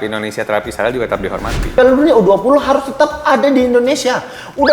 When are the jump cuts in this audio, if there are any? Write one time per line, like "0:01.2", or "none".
0:01.7

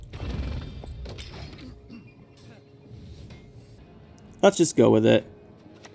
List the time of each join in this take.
0:03.8

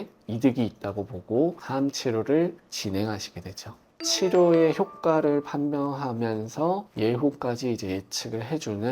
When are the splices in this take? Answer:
0:03.9

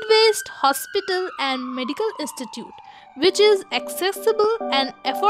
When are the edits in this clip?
none

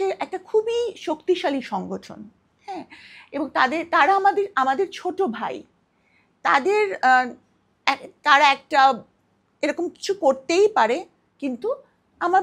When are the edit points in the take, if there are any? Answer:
none

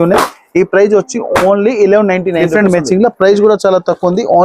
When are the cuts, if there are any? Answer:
0:02.4

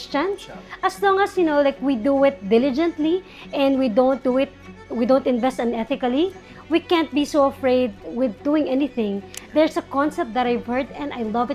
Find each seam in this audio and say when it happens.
0:09.4

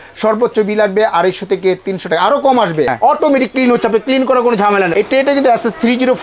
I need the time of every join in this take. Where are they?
0:02.9
0:04.9

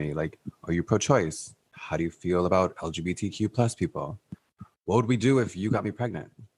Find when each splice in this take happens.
none

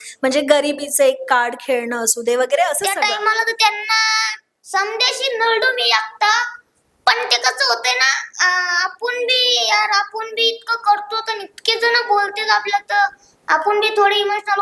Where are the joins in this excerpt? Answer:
0:03.0

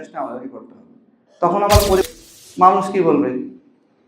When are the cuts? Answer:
0:02.0

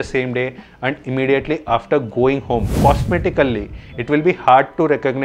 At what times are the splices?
0:02.7

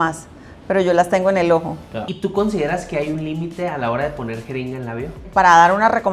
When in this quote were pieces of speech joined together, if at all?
0:02.0
0:05.2

